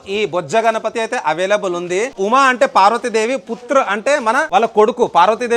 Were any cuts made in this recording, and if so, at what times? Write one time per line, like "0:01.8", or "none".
0:02.2
0:04.5